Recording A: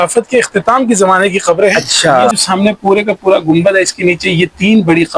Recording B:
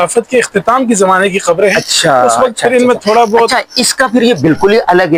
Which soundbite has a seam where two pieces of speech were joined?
A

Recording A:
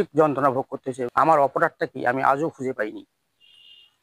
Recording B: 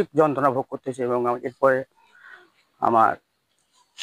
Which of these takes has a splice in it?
A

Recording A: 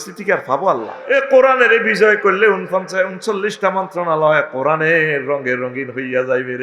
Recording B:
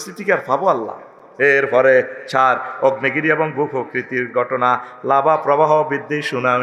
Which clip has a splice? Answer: A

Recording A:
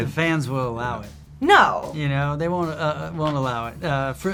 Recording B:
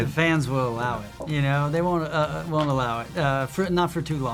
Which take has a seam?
B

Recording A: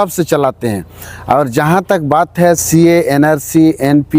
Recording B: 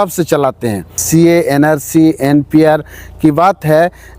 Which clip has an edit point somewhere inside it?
B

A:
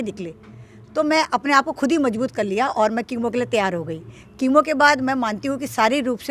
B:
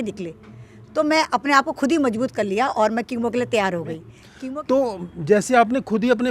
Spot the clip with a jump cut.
B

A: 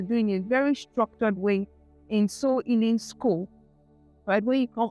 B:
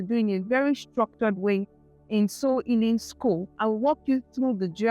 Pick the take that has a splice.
B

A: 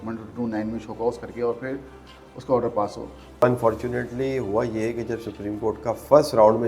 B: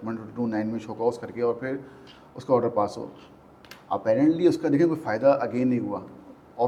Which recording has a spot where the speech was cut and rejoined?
A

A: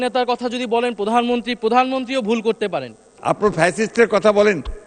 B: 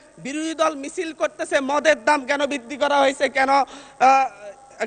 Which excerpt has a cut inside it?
A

